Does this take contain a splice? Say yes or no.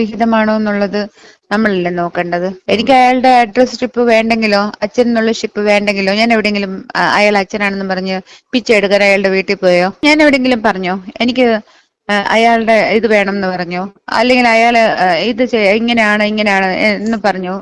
no